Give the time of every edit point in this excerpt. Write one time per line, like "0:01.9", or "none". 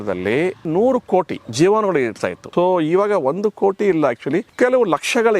0:01.4
0:02.3
0:04.5